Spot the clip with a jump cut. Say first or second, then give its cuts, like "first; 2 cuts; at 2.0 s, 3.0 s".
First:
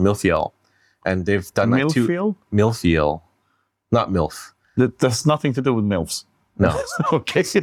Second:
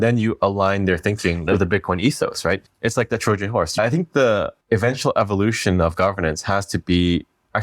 second; 4 cuts; at 1.4 s, 2.6 s, 3.8 s, 4.6 s